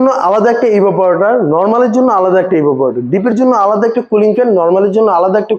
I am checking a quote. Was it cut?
no; 0 cuts

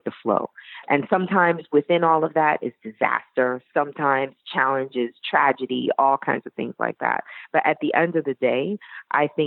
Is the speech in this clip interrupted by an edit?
no; 0 cuts

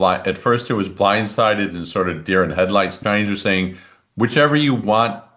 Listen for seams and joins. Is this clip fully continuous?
no; 1 cut; at 2.9 s

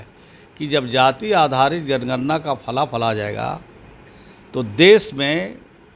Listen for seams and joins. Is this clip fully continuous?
yes; 0 cuts

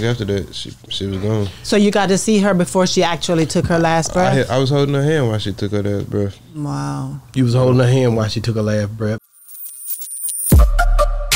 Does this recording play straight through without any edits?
no; 1 cut; at 9.2 s

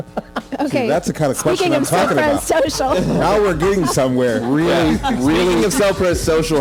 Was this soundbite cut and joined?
no; 0 cuts

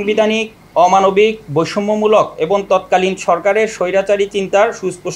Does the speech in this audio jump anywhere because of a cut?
no; 0 cuts

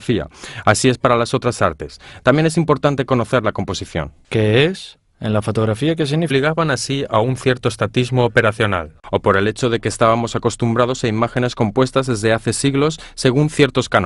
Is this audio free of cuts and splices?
yes; 0 cuts

